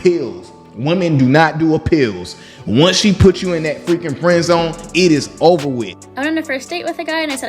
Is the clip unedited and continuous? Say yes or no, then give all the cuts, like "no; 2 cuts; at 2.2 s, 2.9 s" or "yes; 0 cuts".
no; 1 cut; at 6.0 s